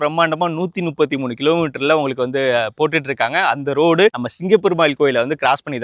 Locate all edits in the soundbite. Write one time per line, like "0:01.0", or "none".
none